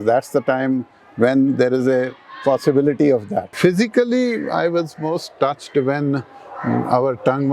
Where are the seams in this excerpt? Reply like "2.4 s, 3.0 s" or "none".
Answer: 3.5 s